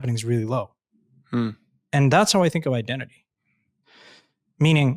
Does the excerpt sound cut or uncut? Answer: uncut